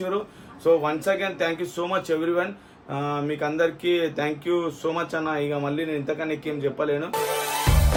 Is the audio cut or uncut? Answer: uncut